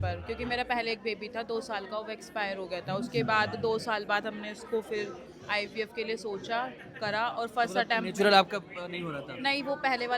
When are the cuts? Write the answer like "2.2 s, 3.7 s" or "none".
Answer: none